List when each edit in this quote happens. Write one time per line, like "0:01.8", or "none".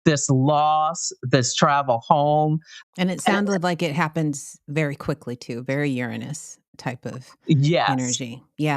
0:02.7